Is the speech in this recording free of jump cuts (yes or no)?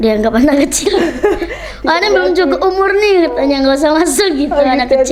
yes